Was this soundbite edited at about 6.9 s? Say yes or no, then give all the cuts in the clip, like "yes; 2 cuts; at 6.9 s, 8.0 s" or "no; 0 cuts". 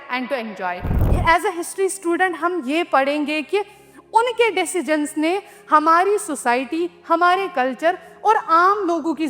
no; 1 cut; at 1.0 s